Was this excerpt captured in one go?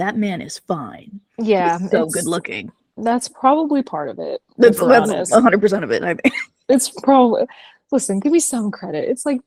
yes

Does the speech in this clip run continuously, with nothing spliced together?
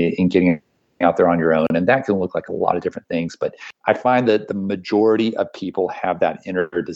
no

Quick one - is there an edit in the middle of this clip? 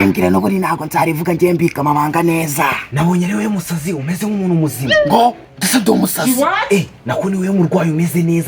no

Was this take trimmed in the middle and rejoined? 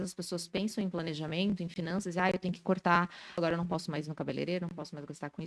yes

